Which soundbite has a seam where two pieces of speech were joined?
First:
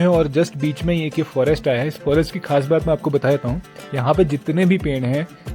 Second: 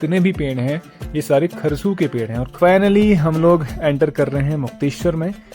second; 1 cut; at 2.5 s

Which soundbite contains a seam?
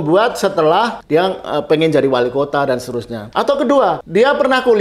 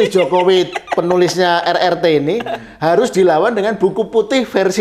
first; 3 cuts; at 1.0 s, 3.1 s, 4.0 s

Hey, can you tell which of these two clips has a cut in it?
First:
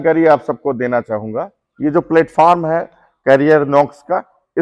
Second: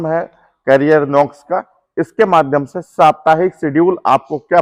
first; 1 cut; at 1.6 s

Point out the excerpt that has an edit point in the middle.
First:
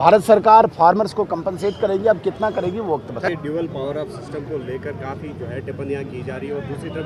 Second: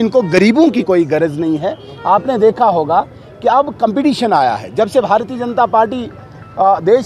first; 1 cut; at 3.3 s

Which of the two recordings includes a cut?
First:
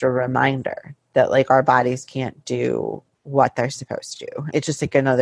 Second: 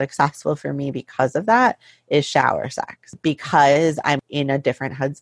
second; 2 cuts; at 3.1 s, 4.2 s

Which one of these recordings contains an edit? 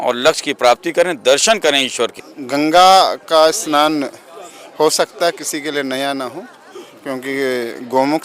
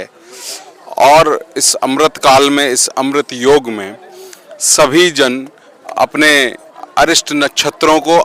first; 1 cut; at 2.3 s

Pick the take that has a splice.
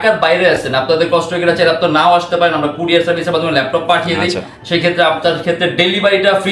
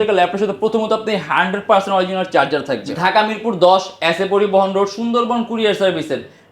second; 1 cut; at 2.9 s

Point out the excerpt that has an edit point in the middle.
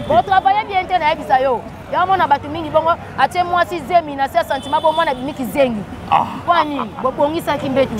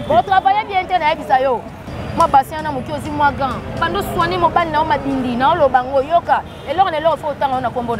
second; 1 cut; at 1.8 s

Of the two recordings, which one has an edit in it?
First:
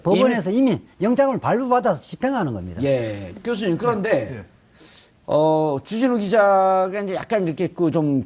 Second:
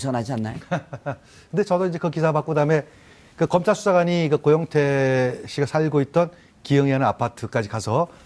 second; 1 cut; at 2.9 s

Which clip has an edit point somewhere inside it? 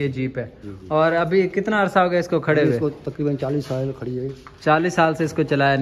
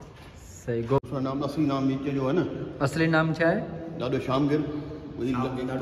second; 1 cut; at 1.0 s

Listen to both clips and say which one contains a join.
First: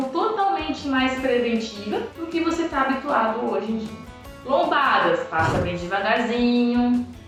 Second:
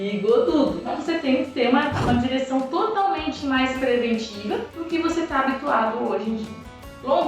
second; 1 cut; at 1.0 s

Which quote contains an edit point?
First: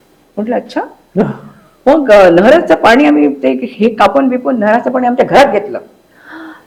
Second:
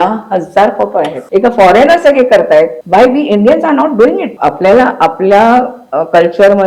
second; 3 cuts; at 1.2 s, 2.8 s, 4.3 s

